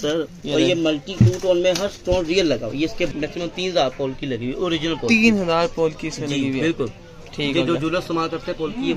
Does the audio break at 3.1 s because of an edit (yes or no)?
yes